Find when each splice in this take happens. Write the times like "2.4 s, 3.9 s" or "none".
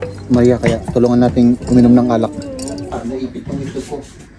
2.9 s